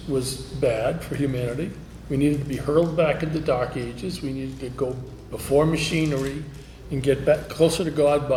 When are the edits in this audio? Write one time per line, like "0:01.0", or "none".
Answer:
none